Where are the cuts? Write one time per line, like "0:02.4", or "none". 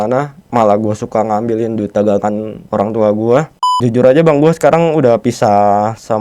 0:02.5
0:03.8